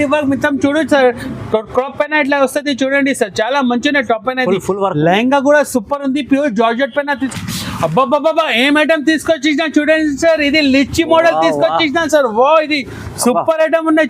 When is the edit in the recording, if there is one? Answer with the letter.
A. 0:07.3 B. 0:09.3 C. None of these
A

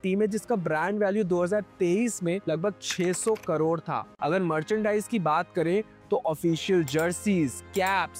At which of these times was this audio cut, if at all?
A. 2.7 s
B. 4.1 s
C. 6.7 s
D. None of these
B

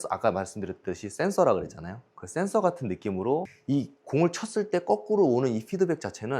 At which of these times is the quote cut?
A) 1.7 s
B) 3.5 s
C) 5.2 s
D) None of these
B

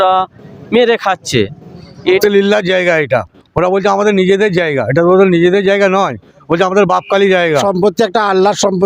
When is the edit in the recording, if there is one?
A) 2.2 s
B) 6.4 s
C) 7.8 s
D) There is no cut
A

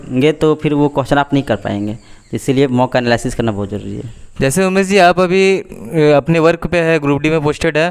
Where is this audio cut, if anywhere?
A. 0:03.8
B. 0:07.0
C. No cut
C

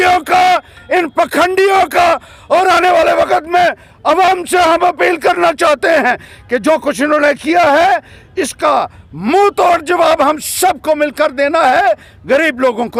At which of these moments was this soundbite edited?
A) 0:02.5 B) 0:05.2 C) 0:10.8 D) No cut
D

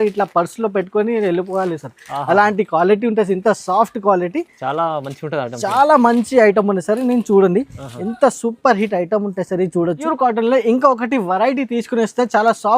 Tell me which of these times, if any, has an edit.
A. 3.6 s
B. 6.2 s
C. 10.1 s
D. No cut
C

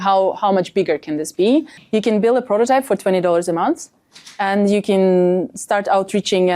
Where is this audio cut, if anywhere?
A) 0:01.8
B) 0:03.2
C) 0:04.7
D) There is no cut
A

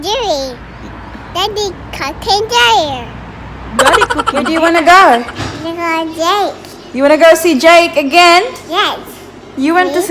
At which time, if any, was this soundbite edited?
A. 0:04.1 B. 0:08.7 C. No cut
A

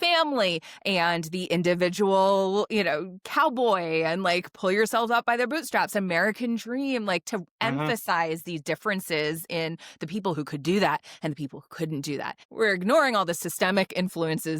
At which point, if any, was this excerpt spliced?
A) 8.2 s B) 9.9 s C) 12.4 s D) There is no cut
C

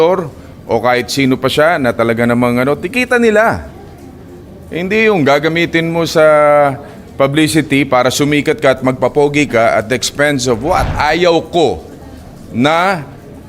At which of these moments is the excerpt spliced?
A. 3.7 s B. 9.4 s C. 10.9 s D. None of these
C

